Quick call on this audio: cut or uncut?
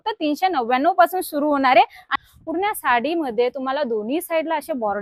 cut